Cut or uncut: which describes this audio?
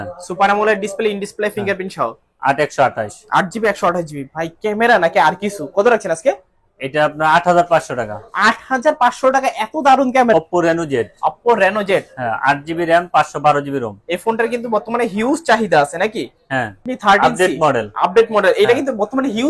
cut